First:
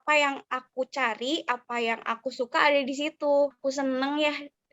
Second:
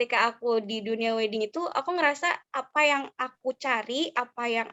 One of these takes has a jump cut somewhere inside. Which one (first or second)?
first